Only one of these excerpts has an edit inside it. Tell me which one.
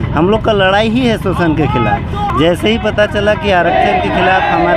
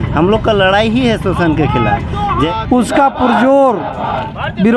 second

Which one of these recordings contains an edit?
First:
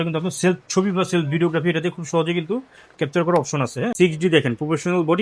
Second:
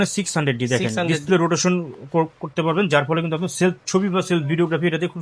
first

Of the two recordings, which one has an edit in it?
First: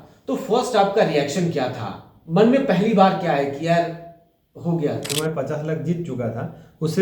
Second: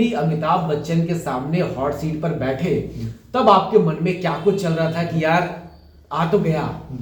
first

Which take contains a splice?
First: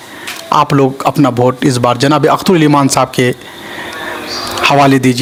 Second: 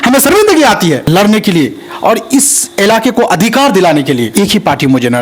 second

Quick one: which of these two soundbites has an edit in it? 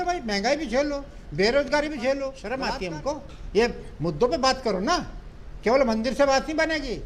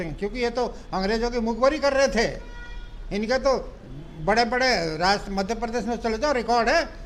first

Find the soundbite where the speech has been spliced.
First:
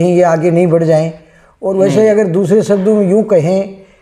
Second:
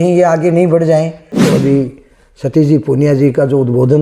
second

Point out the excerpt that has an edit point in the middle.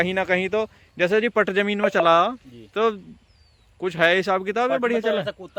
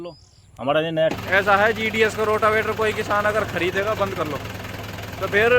second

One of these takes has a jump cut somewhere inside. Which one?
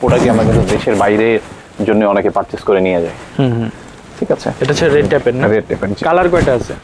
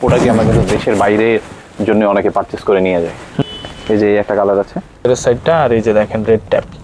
second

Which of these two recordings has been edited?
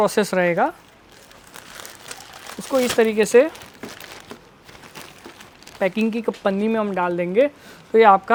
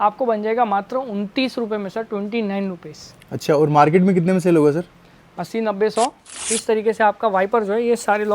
second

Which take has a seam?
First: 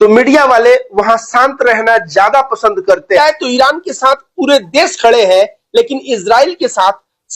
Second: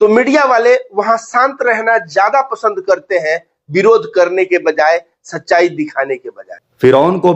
first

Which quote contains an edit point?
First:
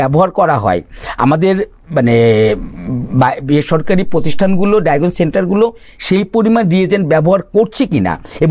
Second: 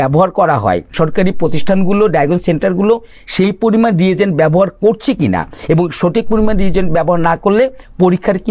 second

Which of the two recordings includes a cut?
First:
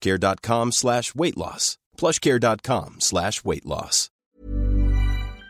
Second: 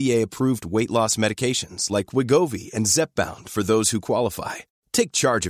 first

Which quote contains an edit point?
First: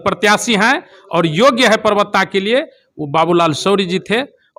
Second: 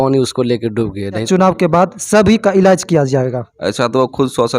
second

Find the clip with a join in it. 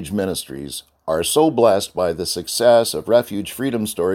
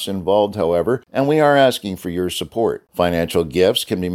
second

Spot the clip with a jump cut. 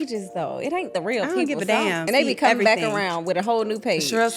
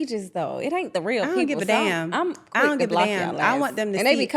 first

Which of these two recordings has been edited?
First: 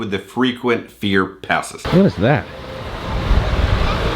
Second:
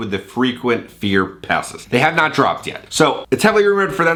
first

